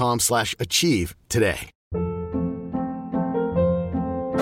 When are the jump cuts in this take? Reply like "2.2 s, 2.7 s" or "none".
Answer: 1.7 s